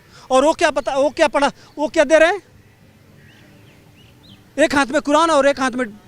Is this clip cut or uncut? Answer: uncut